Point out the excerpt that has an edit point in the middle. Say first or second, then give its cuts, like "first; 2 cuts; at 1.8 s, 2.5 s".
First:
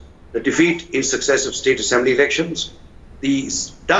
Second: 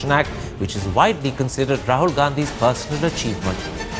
second; 1 cut; at 1.2 s